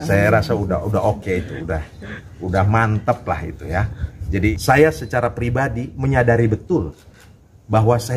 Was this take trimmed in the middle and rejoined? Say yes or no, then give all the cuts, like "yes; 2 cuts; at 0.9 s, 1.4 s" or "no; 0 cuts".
yes; 1 cut; at 4.5 s